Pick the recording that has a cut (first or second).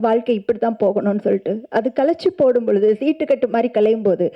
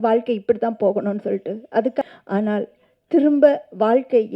second